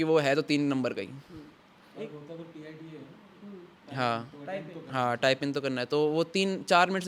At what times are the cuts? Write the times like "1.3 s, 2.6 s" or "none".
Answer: none